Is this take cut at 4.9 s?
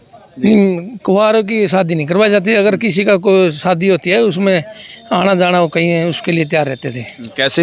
no; 0 cuts

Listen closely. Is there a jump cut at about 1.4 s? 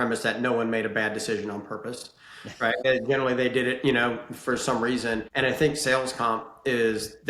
no; 2 cuts; at 2.8 s, 5.3 s

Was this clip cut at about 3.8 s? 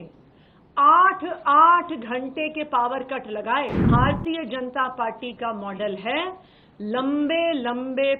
yes; 1 cut; at 3.8 s

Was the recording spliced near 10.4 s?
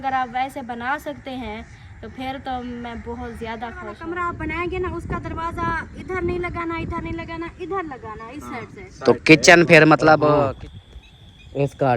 yes; 2 cuts; at 3.9 s, 10.4 s

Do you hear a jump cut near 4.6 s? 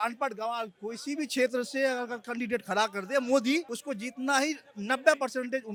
no; 0 cuts

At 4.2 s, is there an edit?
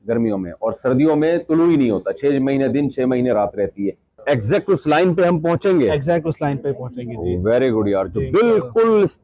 yes; 1 cut; at 4.2 s

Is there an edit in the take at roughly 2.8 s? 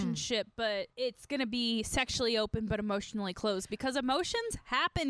no; 1 cut; at 0.9 s

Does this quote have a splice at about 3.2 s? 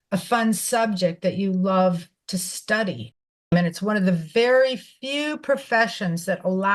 yes; 1 cut; at 3.2 s

